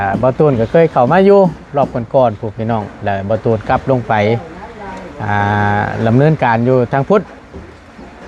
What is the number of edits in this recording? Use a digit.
0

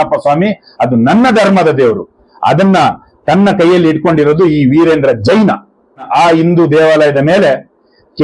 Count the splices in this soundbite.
1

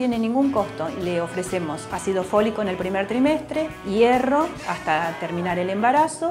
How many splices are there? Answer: 2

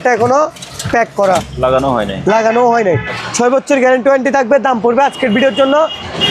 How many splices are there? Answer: 1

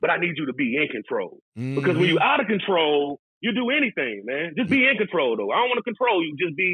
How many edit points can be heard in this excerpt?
0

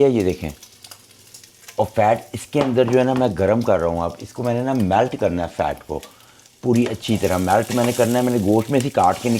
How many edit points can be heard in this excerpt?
0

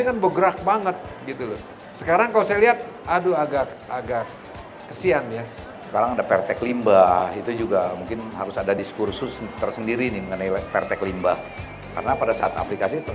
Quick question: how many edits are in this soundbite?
1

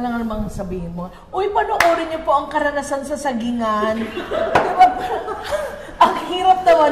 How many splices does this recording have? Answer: 0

